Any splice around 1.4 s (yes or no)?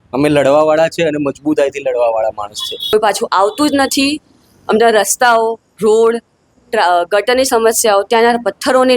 no